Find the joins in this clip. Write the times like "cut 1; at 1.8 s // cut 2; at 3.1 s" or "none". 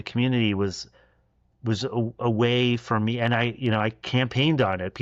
none